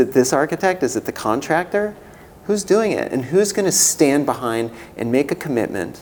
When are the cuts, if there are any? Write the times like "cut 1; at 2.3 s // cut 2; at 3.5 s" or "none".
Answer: none